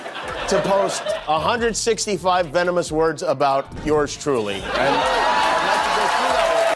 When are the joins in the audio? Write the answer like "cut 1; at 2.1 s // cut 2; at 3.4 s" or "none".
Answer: none